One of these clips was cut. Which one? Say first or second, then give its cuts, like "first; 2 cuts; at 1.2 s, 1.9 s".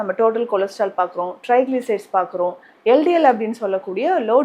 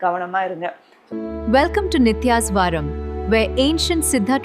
second; 1 cut; at 0.9 s